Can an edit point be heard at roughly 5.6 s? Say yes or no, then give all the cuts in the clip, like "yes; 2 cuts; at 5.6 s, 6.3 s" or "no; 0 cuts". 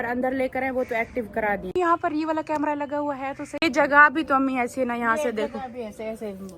no; 2 cuts; at 1.7 s, 3.5 s